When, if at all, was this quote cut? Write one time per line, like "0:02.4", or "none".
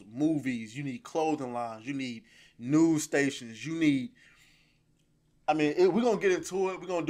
none